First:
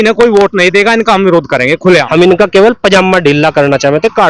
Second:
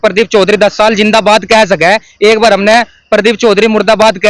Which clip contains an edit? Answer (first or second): first